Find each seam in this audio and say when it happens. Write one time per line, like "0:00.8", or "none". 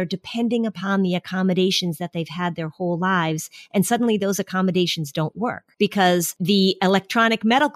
0:05.6
0:06.4

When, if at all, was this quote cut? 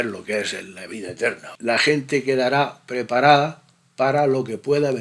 0:01.5

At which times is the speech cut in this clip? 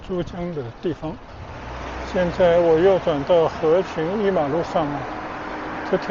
0:01.5

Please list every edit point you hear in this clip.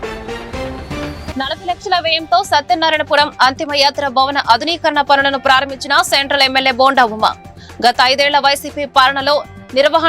0:01.0

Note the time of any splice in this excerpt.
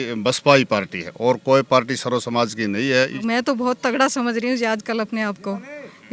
0:03.2

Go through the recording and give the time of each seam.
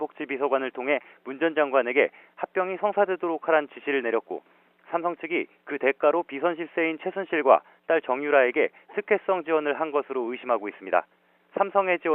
0:08.1

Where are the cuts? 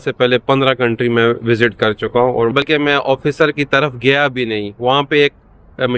0:02.5

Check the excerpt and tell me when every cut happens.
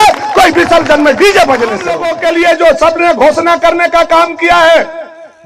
0:02.1

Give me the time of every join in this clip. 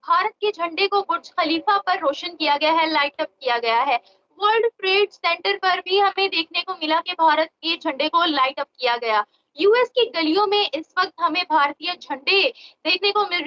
none

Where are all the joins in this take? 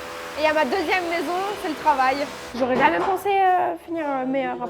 0:02.4

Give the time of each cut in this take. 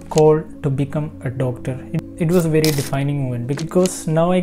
0:02.0

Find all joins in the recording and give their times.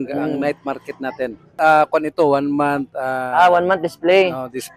0:01.5

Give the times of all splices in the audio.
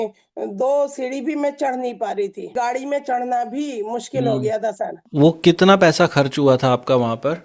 0:02.5
0:05.0

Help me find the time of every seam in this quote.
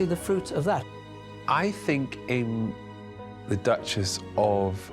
0:01.0

